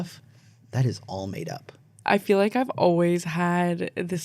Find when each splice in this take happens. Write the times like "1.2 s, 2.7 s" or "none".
1.9 s

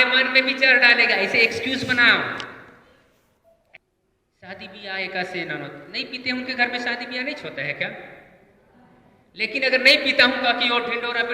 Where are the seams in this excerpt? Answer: 3.6 s

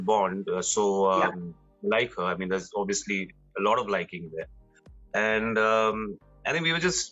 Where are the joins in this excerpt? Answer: none

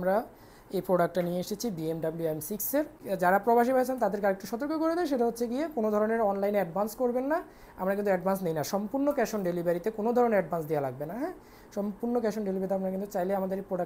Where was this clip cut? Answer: 3.0 s

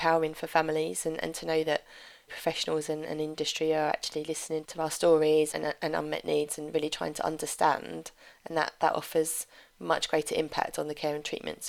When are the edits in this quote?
none

